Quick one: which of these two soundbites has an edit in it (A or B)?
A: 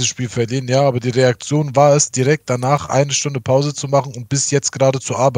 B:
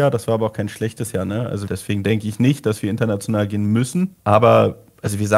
B